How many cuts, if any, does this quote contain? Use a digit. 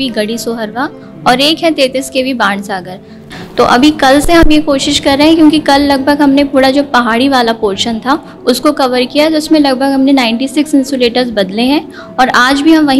1